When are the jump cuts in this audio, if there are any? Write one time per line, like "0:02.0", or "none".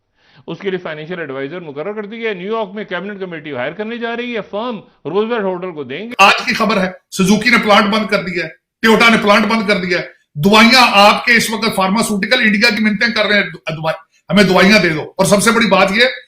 0:06.1